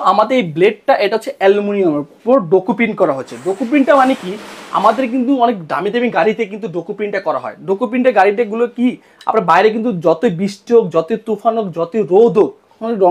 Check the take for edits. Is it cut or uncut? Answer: uncut